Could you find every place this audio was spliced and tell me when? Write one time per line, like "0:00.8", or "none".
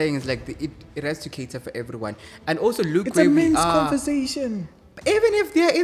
none